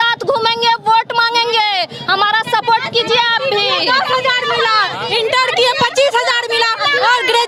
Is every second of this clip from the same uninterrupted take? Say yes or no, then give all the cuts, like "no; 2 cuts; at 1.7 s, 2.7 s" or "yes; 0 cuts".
yes; 0 cuts